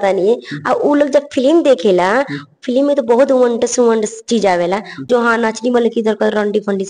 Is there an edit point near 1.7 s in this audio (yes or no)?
no